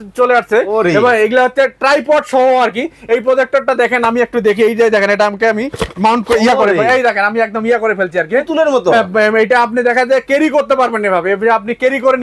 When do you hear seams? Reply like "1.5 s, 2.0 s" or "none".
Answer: none